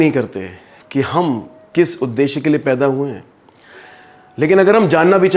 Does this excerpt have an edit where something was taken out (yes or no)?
no